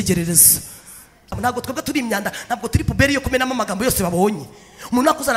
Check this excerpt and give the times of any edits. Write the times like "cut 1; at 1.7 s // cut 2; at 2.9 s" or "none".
cut 1; at 1.4 s